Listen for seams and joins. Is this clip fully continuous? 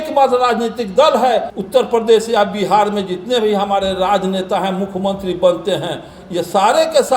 no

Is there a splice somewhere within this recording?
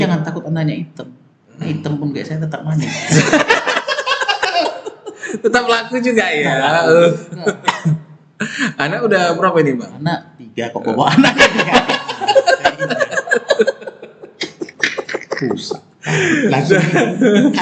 no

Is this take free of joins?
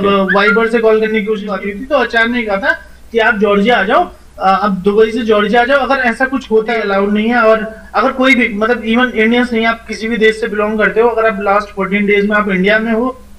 no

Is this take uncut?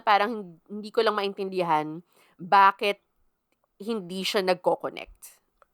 yes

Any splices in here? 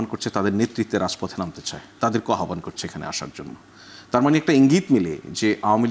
no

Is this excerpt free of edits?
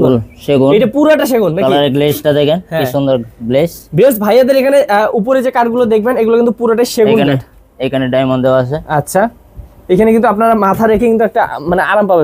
yes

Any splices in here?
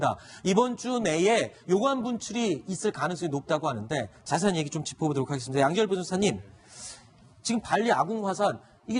no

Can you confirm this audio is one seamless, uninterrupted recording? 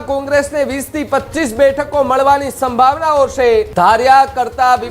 no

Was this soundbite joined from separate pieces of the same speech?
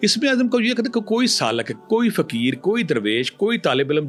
no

